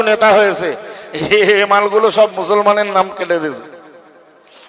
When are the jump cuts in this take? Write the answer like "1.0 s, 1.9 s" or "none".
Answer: none